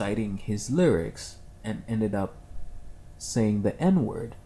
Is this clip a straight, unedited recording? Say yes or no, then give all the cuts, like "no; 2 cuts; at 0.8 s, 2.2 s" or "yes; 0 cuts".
yes; 0 cuts